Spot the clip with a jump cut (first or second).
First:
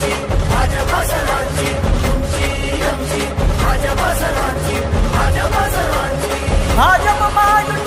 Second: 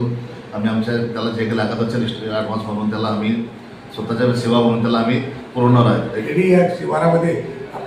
second